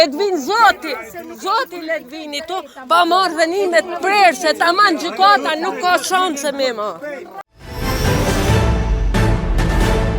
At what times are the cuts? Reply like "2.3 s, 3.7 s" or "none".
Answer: 7.2 s